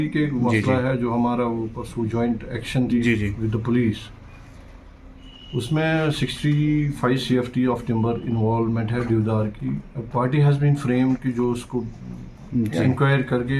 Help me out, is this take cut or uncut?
uncut